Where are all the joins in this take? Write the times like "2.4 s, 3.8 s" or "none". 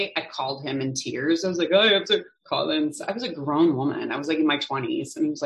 none